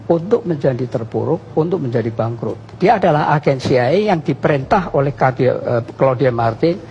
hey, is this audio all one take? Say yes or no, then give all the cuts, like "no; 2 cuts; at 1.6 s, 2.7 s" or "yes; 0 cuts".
no; 1 cut; at 2.6 s